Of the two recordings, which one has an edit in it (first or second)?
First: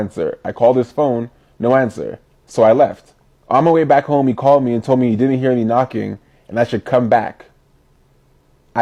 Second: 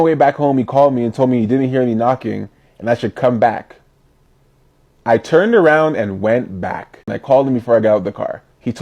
second